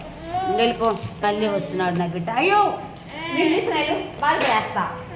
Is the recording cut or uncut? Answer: cut